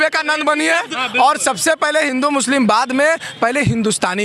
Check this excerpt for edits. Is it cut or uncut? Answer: cut